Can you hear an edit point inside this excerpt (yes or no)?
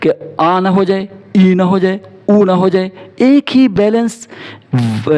no